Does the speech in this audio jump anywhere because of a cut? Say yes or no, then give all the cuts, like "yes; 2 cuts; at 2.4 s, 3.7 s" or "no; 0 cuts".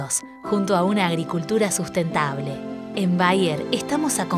no; 0 cuts